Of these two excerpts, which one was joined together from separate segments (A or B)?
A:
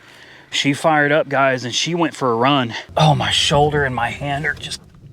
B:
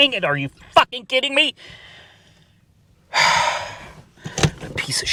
A